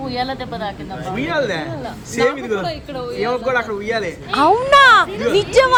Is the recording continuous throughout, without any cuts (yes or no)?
yes